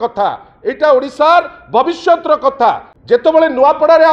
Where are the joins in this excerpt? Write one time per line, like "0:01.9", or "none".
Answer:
0:02.9